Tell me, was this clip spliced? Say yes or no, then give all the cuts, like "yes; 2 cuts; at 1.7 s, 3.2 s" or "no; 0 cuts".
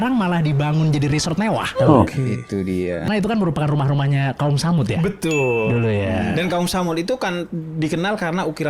yes; 1 cut; at 3.1 s